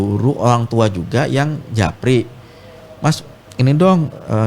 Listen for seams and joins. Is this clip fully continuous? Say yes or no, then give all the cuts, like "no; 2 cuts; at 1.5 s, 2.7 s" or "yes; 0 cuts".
yes; 0 cuts